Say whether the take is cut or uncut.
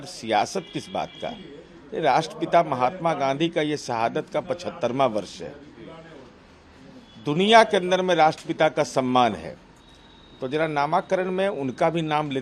uncut